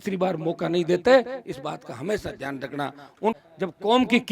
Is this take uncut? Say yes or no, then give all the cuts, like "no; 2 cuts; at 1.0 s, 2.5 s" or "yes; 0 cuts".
no; 1 cut; at 3.4 s